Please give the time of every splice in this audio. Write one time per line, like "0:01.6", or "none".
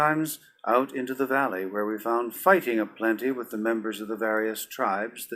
0:02.8